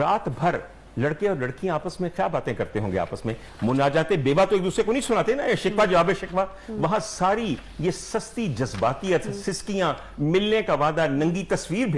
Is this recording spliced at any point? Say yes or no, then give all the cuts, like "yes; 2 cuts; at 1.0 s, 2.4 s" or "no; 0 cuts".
no; 0 cuts